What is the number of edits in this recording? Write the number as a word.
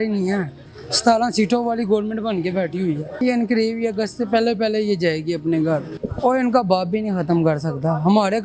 two